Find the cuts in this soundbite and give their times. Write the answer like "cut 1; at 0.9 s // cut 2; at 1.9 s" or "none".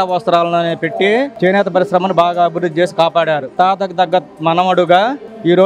cut 1; at 3.5 s